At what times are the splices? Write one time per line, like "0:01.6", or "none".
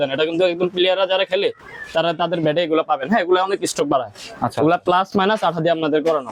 none